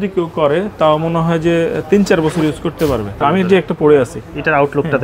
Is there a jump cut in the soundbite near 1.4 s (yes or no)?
no